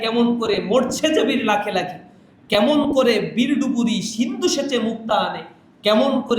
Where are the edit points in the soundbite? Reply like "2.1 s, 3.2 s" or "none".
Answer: none